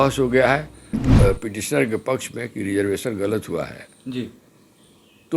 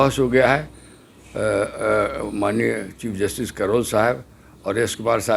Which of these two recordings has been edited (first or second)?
first